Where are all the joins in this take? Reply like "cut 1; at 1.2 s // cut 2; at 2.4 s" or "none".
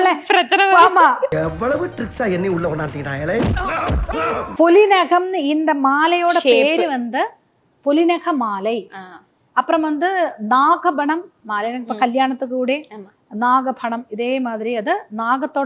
none